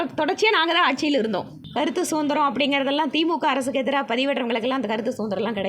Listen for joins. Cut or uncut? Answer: cut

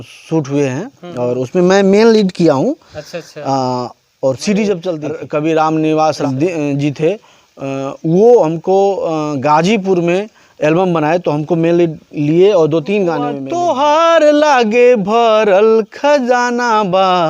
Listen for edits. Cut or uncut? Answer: cut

